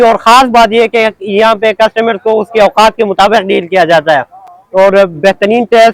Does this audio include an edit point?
no; 0 cuts

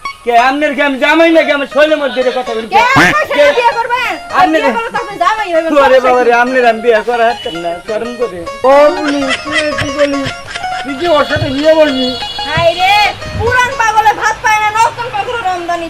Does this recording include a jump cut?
yes; 1 cut; at 8.5 s

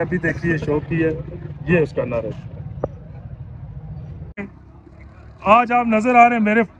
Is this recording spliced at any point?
yes; 1 cut; at 4.4 s

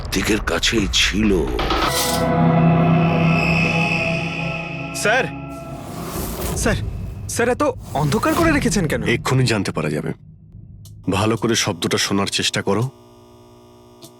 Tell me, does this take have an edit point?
yes; 1 cut; at 1.9 s

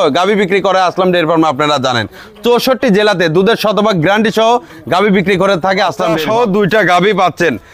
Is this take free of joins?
no; 1 cut; at 6.1 s

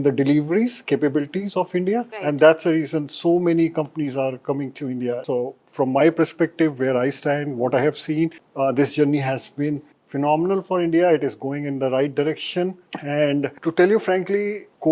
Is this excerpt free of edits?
yes; 0 cuts

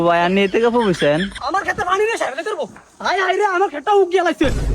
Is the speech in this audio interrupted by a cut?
yes; 1 cut; at 1.3 s

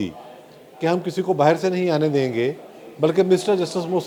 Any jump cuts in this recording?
no; 0 cuts

